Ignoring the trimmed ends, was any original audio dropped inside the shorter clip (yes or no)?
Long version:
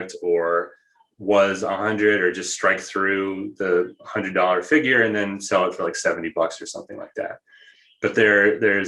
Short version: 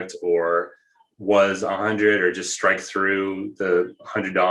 no